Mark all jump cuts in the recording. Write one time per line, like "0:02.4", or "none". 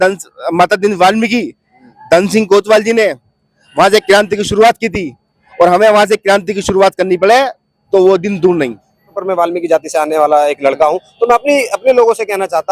0:09.2

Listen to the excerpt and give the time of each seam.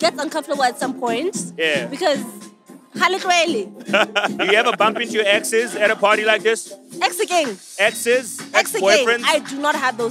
0:04.4
0:06.8
0:07.6

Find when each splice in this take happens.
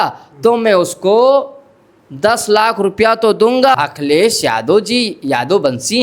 0:03.8

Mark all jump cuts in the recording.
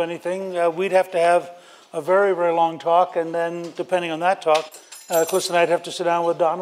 none

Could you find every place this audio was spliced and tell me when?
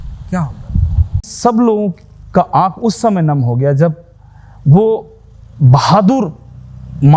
0:01.3

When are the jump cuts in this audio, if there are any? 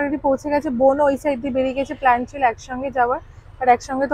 none

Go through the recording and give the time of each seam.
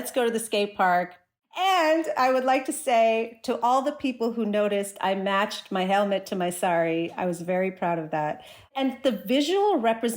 0:01.5
0:08.7

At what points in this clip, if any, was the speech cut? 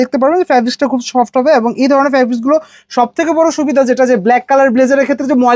none

